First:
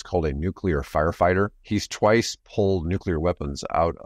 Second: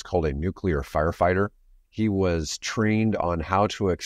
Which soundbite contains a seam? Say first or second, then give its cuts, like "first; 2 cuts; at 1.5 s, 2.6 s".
first; 2 cuts; at 1.6 s, 2.8 s